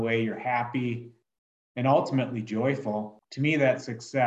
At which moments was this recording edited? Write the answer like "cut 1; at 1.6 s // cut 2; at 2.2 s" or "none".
cut 1; at 3.2 s